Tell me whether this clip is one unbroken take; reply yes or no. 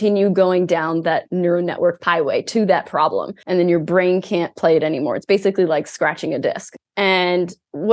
no